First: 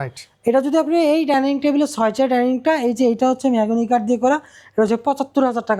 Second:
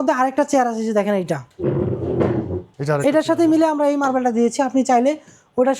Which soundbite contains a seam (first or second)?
second